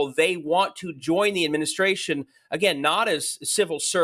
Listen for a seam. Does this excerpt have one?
no; 0 cuts

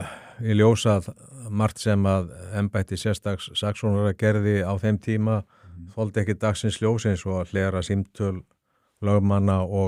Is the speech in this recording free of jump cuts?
yes; 0 cuts

